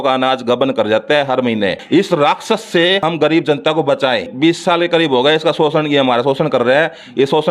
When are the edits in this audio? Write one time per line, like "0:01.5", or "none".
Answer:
0:01.8
0:03.0
0:04.3

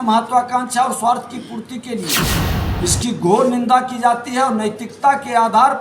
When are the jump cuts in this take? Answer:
none

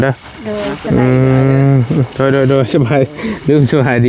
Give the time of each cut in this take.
none

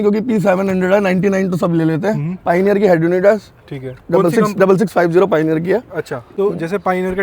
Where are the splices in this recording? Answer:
none

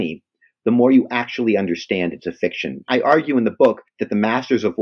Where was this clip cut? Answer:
0:02.9
0:03.9

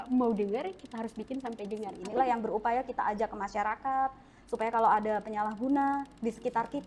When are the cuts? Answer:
0:02.0

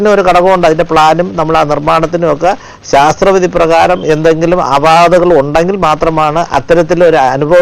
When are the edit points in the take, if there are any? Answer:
none

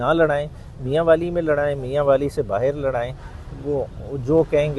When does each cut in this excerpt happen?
none

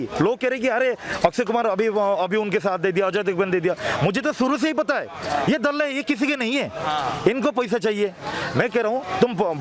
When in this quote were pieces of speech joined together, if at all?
none

